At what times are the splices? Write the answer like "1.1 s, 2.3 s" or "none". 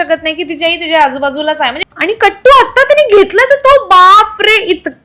1.9 s